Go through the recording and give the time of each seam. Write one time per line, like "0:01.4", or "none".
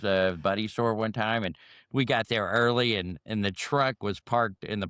none

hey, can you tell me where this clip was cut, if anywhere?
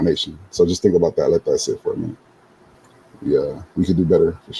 0:02.3

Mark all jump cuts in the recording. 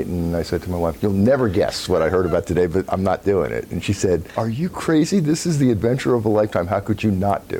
0:00.9
0:04.3

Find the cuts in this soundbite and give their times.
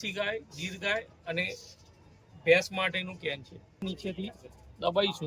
0:03.8

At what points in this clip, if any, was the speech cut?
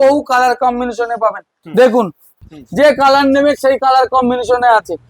0:02.3

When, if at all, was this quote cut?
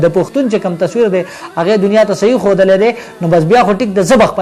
none

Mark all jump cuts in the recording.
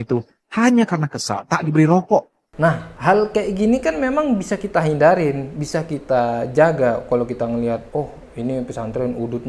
none

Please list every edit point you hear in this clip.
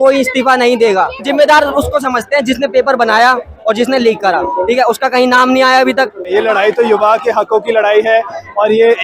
0:01.3
0:06.3

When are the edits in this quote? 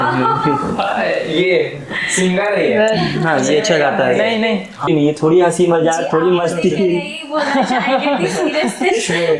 0:04.9

